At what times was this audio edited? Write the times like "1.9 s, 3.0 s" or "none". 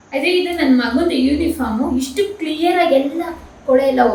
none